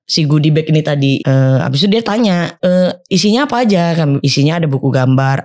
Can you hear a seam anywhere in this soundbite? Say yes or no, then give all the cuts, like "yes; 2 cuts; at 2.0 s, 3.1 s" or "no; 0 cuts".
yes; 3 cuts; at 1.2 s, 2.5 s, 4.2 s